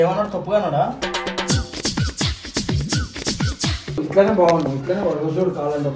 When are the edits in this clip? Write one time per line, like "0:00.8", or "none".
0:00.9
0:04.0